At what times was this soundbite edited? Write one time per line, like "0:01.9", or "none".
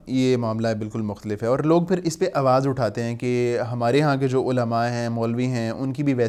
none